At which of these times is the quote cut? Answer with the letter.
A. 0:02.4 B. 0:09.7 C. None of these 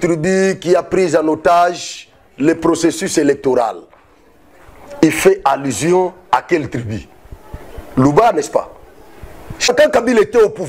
B